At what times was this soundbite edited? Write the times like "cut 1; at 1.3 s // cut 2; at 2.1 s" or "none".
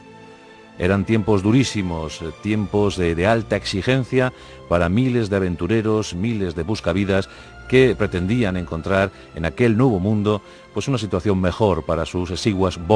cut 1; at 7.5 s